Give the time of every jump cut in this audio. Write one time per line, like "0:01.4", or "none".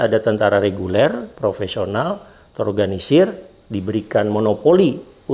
none